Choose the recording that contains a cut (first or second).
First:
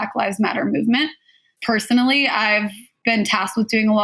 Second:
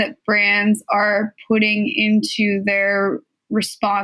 first